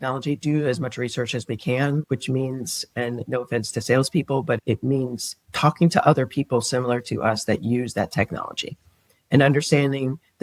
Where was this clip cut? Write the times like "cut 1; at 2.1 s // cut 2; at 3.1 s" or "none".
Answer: cut 1; at 4.6 s